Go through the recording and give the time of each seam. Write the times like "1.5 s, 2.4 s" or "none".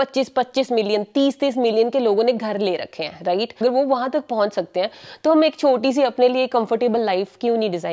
3.6 s